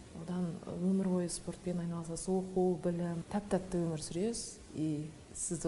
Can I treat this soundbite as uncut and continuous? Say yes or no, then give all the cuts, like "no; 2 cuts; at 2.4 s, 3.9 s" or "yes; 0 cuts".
no; 1 cut; at 3.2 s